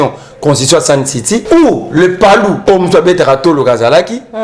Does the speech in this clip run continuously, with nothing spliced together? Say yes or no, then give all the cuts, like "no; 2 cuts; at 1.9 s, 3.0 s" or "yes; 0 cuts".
no; 2 cuts; at 1.4 s, 2.6 s